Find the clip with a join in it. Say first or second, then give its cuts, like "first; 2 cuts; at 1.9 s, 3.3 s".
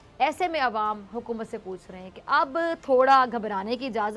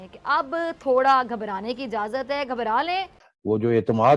second; 1 cut; at 3.2 s